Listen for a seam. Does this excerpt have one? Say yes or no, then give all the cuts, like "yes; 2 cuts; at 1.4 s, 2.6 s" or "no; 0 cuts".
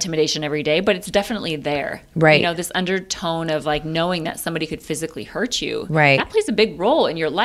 no; 0 cuts